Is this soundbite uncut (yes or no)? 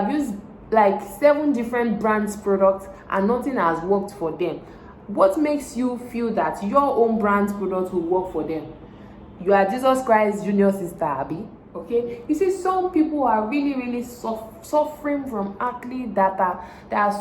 no